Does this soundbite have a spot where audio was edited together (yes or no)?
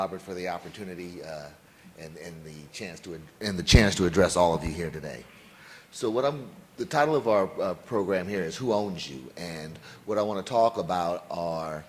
yes